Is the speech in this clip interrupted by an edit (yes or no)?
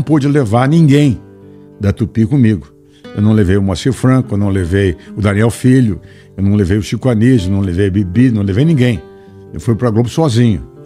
no